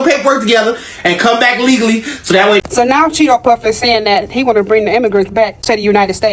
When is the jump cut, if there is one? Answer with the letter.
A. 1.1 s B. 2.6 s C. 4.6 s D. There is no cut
B